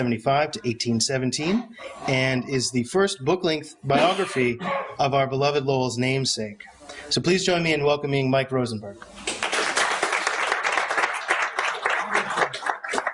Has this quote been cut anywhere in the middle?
yes; 1 cut; at 1.1 s

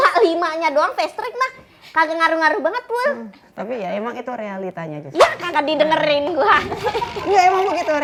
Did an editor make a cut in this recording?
no; 0 cuts

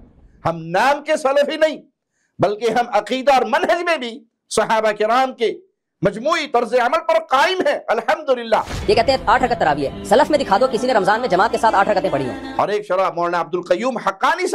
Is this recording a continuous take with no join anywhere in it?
no; 2 cuts; at 8.7 s, 12.4 s

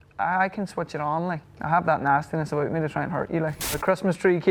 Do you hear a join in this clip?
yes; 2 cuts; at 1.4 s, 3.8 s

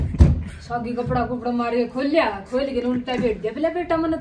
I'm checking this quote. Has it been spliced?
no; 0 cuts

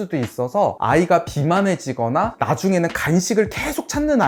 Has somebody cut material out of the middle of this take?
no; 0 cuts

